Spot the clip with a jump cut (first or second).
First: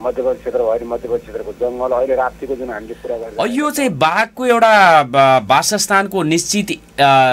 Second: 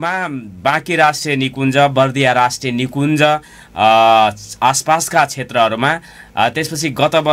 first